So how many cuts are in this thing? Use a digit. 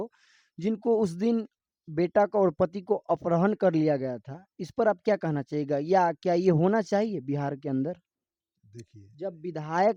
0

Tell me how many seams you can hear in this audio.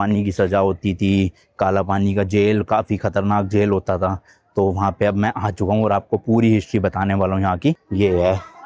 1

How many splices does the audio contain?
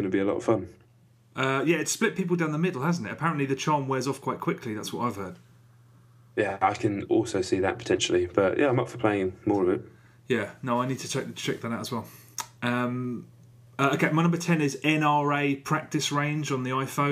0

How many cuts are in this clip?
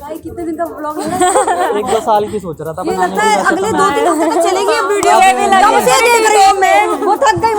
0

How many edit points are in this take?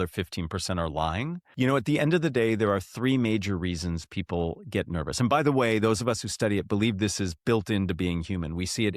1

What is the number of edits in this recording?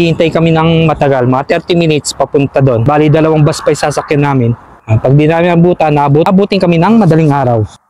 2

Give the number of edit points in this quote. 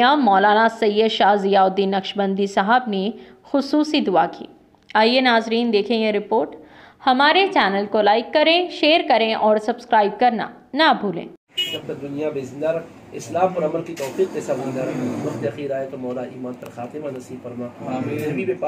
1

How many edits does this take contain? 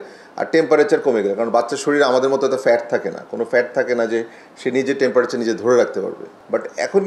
0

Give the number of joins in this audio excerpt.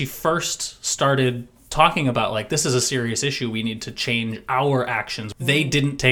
1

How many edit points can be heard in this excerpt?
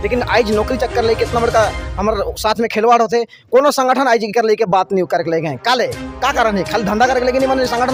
0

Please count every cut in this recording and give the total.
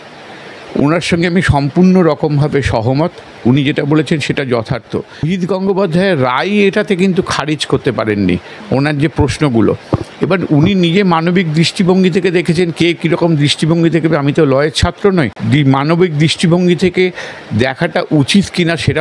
2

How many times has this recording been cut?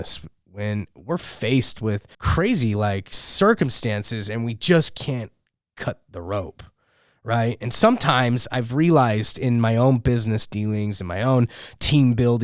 1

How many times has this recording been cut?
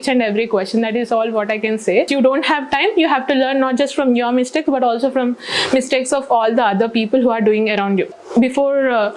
2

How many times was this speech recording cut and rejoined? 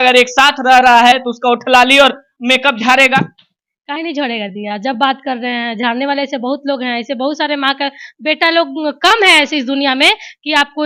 0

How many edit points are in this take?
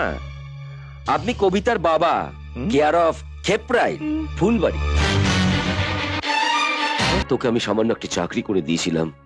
1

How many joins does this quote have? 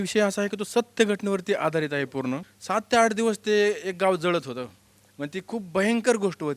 1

